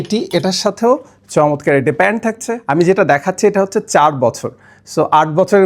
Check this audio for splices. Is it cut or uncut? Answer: cut